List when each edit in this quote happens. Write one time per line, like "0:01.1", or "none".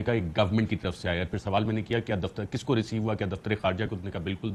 none